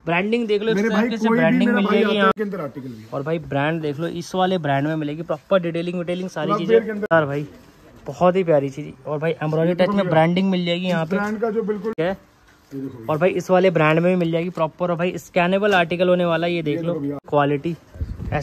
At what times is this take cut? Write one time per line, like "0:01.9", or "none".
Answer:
0:02.3
0:07.1
0:12.0
0:17.2